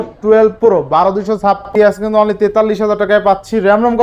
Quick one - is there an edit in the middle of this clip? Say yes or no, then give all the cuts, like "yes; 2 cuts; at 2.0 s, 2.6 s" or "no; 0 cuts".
yes; 1 cut; at 1.7 s